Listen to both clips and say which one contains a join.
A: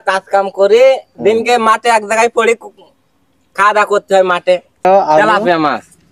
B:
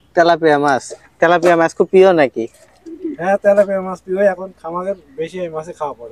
A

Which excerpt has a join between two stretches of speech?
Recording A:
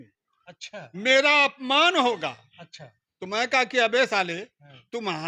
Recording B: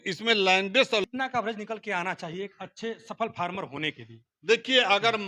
B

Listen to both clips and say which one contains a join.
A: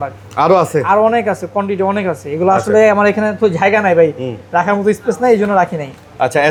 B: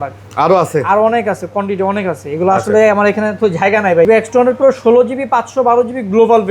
B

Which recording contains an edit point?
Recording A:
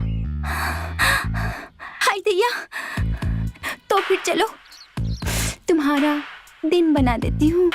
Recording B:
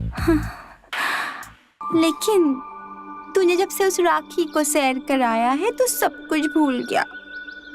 B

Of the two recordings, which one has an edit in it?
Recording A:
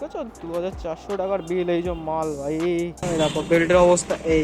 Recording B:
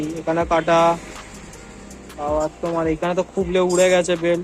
A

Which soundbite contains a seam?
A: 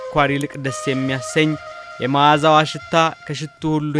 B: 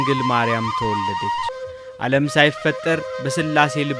B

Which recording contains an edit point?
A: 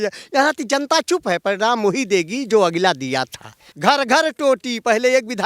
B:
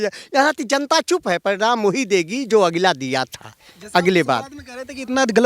A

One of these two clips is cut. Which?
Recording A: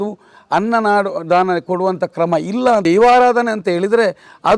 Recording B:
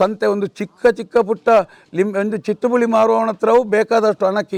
A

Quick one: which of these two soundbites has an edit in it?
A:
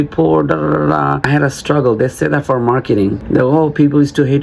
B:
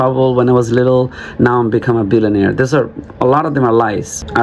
A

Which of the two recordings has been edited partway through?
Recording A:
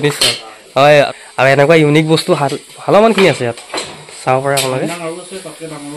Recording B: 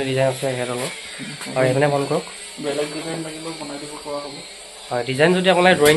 A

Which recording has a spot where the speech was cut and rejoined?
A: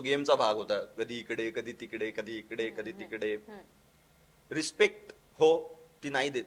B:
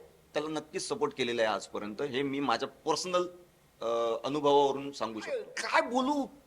B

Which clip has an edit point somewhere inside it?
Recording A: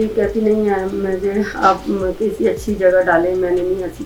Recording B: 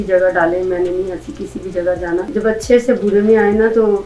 B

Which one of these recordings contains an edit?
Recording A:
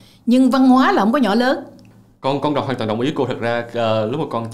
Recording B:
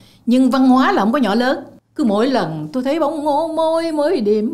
B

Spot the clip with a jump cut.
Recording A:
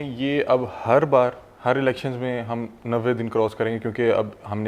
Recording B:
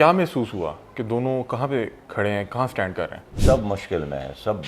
B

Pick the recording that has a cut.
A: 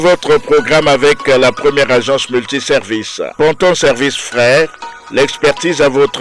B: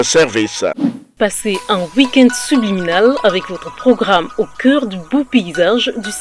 B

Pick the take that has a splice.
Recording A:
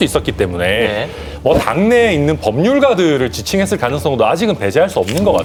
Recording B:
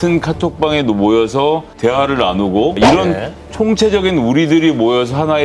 B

